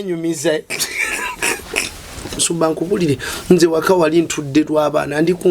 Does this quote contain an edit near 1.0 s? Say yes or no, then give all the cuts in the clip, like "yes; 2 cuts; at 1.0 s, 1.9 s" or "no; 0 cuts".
no; 1 cut; at 2.4 s